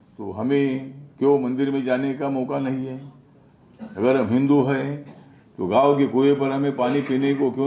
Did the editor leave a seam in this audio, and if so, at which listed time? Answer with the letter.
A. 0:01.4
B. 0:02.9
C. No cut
C